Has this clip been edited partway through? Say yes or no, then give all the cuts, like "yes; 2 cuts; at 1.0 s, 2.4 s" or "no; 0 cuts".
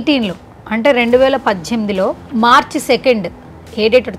no; 0 cuts